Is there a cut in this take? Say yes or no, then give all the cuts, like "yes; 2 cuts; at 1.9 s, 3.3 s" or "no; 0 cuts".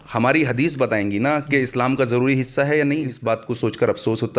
yes; 1 cut; at 3.1 s